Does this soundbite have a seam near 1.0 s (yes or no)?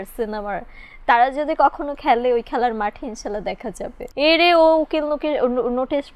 no